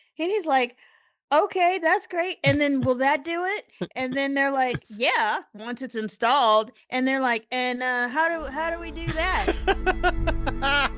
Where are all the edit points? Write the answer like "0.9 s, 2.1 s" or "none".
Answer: none